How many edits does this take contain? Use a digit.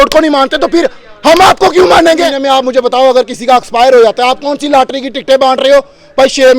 1